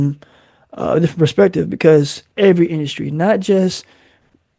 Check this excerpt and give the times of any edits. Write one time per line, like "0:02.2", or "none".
0:02.2